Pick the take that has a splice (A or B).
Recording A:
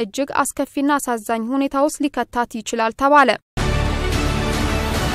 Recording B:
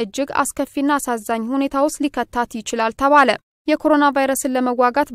A